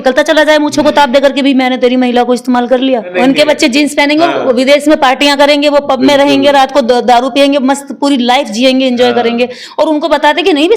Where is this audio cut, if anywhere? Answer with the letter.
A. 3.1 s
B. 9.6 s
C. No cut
A